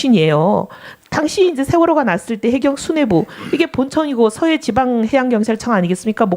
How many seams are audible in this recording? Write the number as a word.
one